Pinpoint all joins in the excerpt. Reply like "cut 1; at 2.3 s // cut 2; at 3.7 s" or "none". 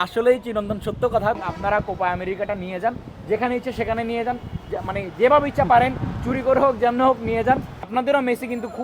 cut 1; at 1.5 s // cut 2; at 7.8 s